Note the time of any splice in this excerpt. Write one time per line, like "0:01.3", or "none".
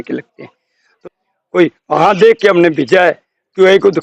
0:00.9